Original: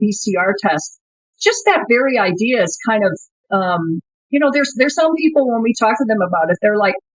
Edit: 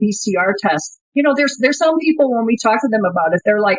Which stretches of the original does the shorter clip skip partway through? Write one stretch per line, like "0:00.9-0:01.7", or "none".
0:01.0-0:04.1